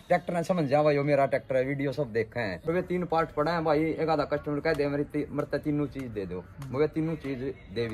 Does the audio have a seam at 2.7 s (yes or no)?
yes